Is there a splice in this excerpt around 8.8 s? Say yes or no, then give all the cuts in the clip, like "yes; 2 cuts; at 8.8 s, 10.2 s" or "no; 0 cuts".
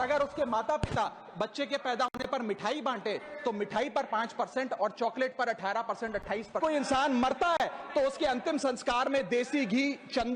no; 1 cut; at 6.6 s